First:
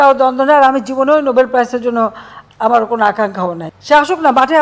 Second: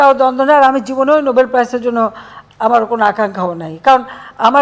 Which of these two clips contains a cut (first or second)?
first